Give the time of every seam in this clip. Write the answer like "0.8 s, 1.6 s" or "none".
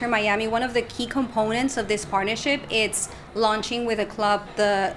none